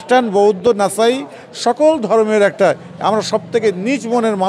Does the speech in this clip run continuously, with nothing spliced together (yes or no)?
yes